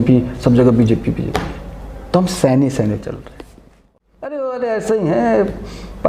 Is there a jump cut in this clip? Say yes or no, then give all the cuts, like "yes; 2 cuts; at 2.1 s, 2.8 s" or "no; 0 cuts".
yes; 1 cut; at 3.8 s